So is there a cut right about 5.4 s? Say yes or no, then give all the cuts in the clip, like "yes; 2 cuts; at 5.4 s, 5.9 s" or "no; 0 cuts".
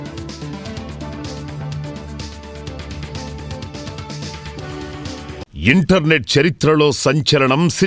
yes; 1 cut; at 5.4 s